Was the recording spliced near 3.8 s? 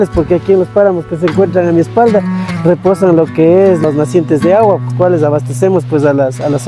yes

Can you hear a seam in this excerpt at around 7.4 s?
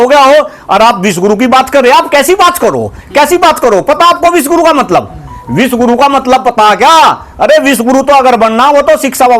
no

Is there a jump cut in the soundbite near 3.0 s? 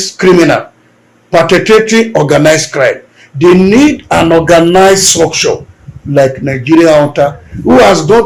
no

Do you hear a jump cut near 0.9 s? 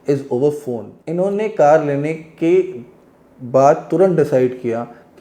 yes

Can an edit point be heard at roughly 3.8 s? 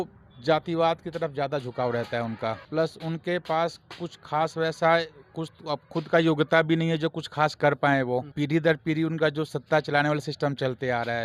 no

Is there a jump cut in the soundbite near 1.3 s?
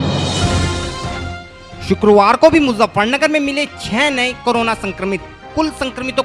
yes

